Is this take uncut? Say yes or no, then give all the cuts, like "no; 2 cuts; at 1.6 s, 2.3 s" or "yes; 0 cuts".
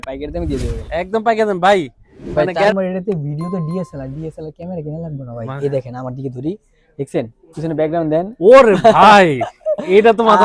no; 1 cut; at 2.7 s